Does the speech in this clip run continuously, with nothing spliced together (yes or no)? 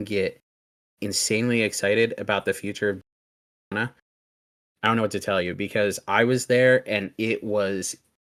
yes